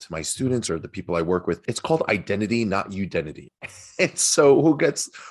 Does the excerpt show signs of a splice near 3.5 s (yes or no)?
yes